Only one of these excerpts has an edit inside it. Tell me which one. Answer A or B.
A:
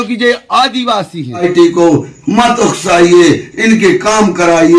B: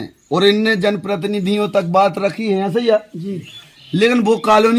A